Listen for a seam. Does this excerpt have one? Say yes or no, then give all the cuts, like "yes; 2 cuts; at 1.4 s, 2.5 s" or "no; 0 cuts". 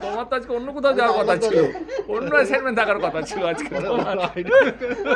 no; 0 cuts